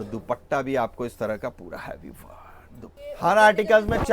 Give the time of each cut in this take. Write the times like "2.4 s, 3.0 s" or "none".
2.9 s